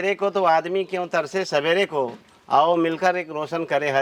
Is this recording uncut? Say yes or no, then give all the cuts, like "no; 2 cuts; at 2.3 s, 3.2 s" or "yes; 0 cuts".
yes; 0 cuts